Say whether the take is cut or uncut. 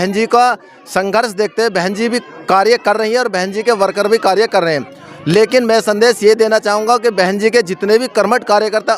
uncut